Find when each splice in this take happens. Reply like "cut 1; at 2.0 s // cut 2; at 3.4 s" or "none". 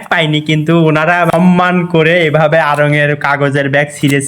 cut 1; at 1.3 s